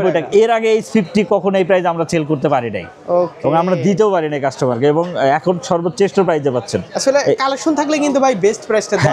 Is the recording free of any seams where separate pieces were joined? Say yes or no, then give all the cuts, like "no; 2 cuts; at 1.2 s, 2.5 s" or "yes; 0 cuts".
yes; 0 cuts